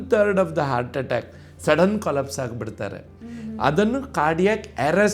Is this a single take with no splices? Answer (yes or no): no